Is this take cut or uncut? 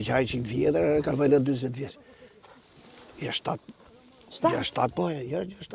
uncut